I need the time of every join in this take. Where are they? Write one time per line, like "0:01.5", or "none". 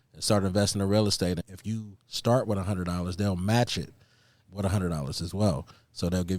0:01.5
0:04.5